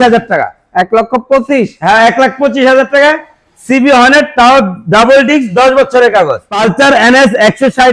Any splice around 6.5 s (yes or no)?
yes